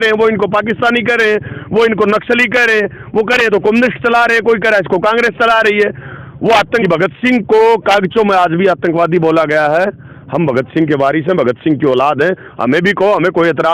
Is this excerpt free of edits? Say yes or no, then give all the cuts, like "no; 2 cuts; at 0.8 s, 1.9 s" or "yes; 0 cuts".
no; 1 cut; at 6.8 s